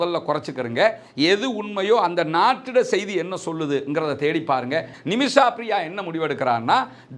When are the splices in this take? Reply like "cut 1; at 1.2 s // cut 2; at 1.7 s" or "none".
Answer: cut 1; at 4.9 s

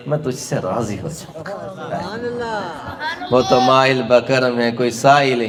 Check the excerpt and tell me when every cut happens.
none

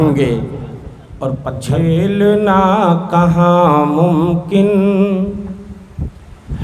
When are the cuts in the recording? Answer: cut 1; at 1.6 s

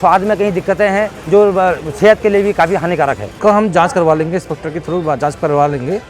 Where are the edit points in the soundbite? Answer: cut 1; at 1.1 s // cut 2; at 3.2 s

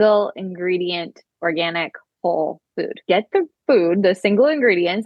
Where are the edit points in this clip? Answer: cut 1; at 3.0 s

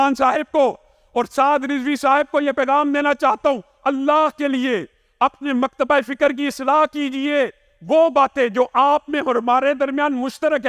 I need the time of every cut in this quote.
none

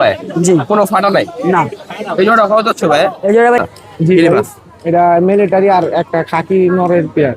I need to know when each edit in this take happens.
cut 1; at 3.6 s

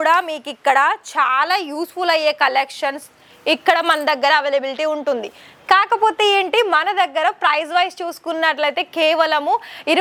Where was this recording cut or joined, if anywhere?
none

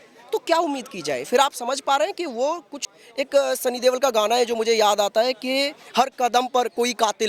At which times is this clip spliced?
cut 1; at 2.7 s

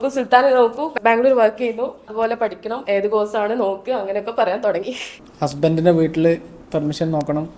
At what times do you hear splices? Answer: cut 1; at 0.9 s // cut 2; at 2.1 s // cut 3; at 5.2 s

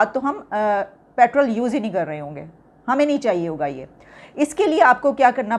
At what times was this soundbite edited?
none

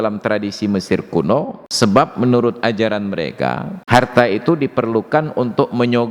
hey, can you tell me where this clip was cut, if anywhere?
cut 1; at 1.6 s // cut 2; at 3.7 s

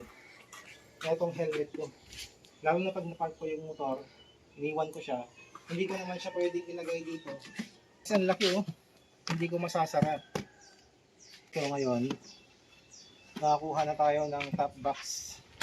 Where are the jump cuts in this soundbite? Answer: cut 1; at 8.0 s // cut 2; at 11.5 s

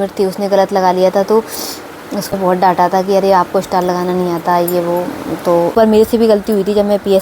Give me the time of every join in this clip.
cut 1; at 2.3 s // cut 2; at 5.7 s

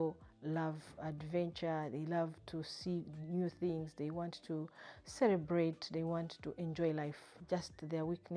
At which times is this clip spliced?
cut 1; at 7.3 s

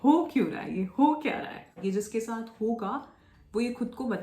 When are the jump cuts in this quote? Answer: cut 1; at 1.8 s

